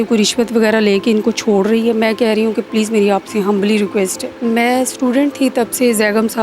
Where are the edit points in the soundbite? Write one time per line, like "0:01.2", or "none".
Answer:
0:04.3